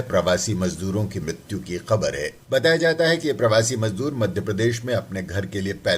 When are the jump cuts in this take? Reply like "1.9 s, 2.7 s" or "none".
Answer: 2.4 s